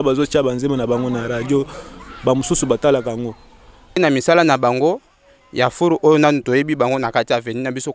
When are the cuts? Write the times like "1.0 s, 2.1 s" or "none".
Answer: 4.0 s